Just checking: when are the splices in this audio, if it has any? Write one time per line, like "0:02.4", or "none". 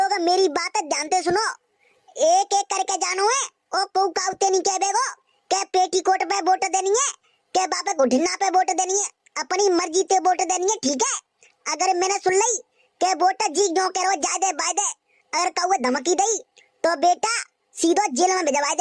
none